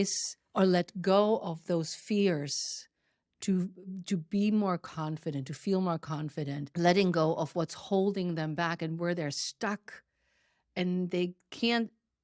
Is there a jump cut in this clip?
yes; 1 cut; at 6.7 s

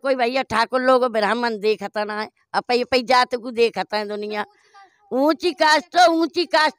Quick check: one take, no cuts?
yes; 0 cuts

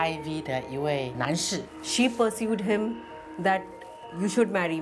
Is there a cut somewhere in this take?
yes; 1 cut; at 1.4 s

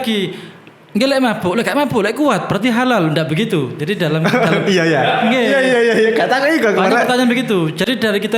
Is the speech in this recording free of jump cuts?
yes; 0 cuts

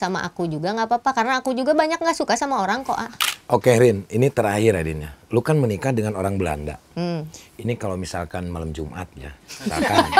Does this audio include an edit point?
yes; 1 cut; at 3.1 s

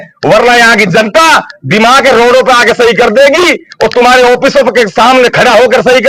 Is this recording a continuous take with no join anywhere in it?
yes; 0 cuts

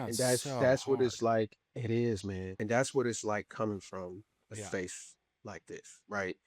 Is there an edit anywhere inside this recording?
no; 0 cuts

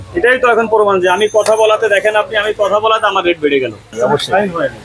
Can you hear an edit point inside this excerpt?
yes; 1 cut; at 3.9 s

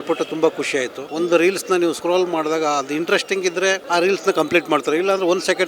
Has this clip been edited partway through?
yes; 3 cuts; at 1.0 s, 2.0 s, 3.8 s

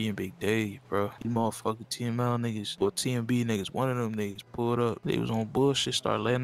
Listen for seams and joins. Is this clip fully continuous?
no; 3 cuts; at 1.2 s, 2.7 s, 5.0 s

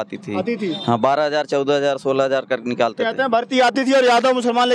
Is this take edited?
no; 0 cuts

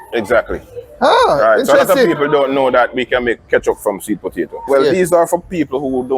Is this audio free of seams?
no; 1 cut; at 4.7 s

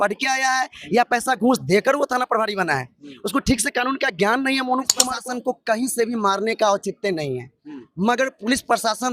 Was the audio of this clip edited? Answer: yes; 1 cut; at 5.0 s

